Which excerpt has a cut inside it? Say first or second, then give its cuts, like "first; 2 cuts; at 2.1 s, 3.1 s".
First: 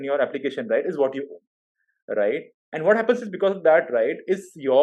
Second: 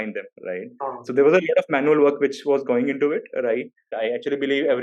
second; 1 cut; at 3.9 s